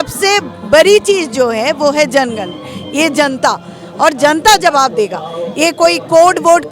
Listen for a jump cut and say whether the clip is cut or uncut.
uncut